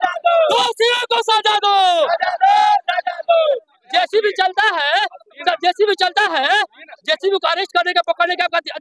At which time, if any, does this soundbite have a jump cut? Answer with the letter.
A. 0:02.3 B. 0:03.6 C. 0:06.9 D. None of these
B